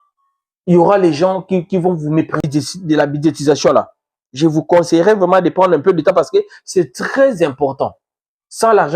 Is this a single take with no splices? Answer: no; 1 cut; at 2.4 s

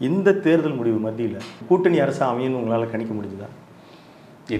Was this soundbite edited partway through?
no; 0 cuts

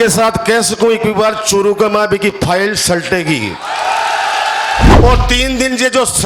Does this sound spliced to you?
yes; 1 cut; at 4.9 s

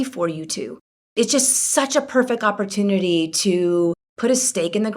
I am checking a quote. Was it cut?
yes; 1 cut; at 4.1 s

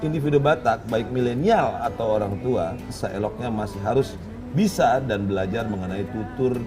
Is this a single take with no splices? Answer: no; 1 cut; at 3.0 s

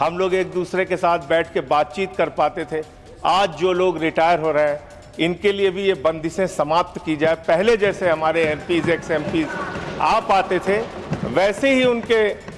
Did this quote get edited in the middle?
no; 0 cuts

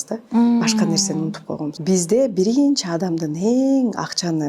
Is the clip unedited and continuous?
no; 1 cut; at 1.7 s

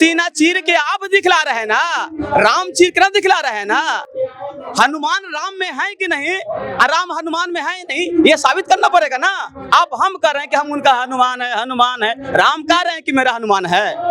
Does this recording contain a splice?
no; 0 cuts

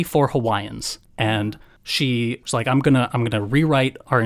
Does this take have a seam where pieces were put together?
no; 0 cuts

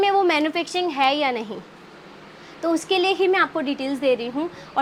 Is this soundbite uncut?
yes; 0 cuts

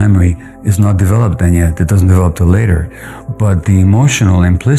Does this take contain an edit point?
no; 0 cuts

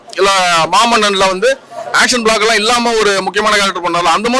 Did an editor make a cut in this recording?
no; 0 cuts

